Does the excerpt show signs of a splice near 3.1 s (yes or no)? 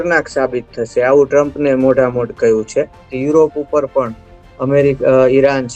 yes